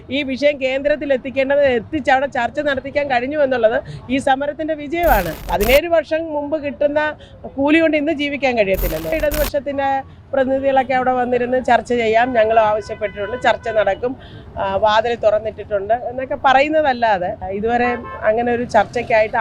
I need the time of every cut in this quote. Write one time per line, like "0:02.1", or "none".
0:05.4
0:09.1
0:17.4